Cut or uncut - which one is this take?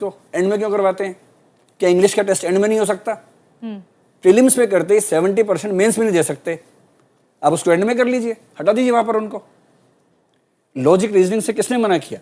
uncut